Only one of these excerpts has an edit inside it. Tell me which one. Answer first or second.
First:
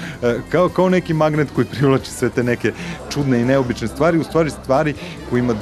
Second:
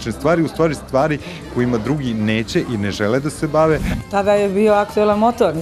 second